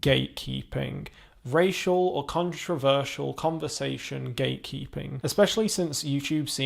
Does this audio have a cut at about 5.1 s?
yes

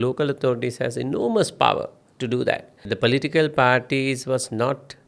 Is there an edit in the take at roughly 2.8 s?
yes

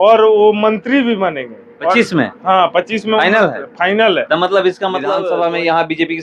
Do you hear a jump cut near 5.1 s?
yes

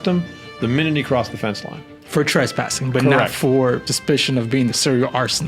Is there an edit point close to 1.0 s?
no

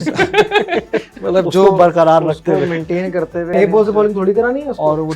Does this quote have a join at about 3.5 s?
yes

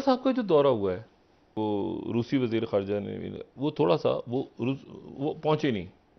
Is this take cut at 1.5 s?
yes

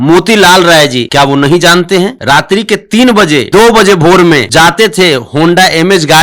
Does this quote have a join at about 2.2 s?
yes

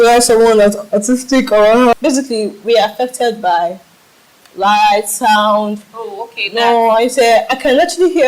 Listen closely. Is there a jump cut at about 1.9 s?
yes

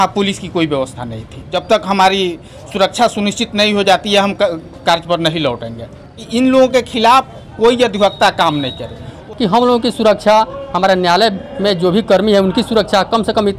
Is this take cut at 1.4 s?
yes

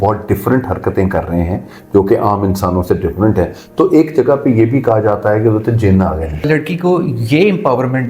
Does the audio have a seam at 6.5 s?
yes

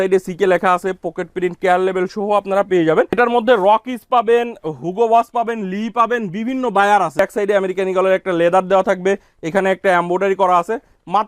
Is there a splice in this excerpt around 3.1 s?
yes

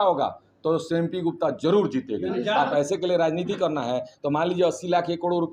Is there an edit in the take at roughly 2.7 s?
yes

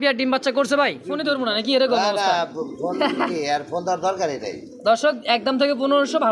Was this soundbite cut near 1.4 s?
yes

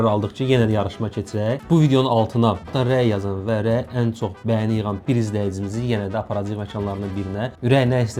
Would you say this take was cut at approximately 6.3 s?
no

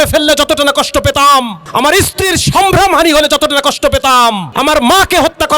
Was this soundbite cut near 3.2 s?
no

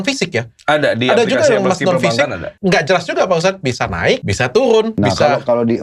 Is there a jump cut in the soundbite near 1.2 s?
no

